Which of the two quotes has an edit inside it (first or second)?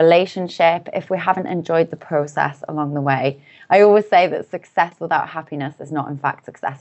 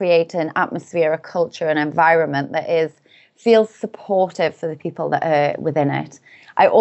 first